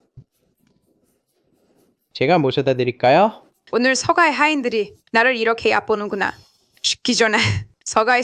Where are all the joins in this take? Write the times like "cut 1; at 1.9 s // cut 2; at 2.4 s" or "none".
none